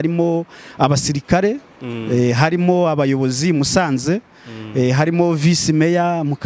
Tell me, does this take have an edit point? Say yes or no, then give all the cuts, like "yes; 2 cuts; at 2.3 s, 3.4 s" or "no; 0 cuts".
no; 0 cuts